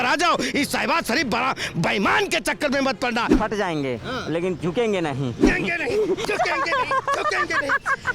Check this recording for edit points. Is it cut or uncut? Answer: cut